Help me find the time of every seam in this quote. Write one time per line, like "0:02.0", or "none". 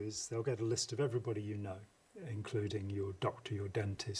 none

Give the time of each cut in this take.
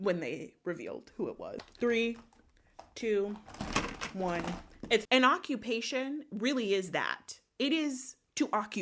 0:01.7
0:05.0

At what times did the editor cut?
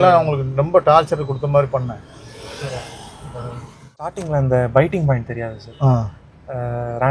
0:04.2

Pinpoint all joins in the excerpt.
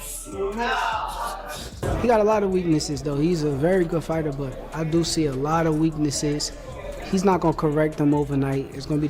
0:01.8

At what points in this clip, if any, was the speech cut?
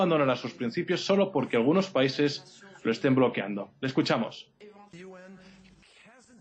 0:03.5

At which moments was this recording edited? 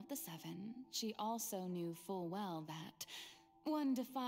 none

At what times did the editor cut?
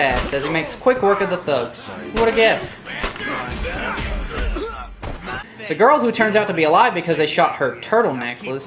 0:05.2

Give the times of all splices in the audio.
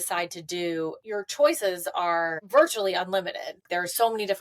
0:01.0
0:02.4
0:03.6

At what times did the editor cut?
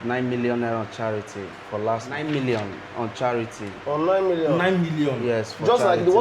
0:02.1

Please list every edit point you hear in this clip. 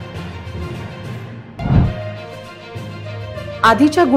0:00.9

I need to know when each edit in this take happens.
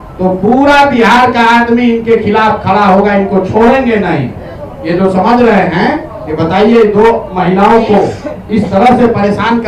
none

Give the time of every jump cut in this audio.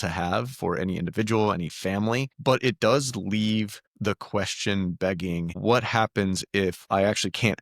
0:02.3
0:03.8
0:05.6

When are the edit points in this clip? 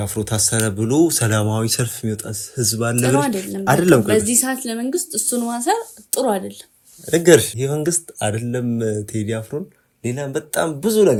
none

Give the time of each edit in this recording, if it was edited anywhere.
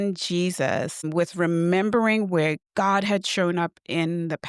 0:01.1

